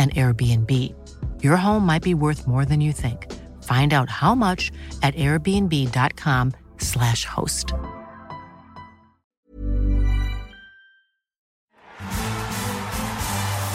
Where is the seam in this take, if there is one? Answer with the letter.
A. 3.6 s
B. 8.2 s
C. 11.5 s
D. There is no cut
C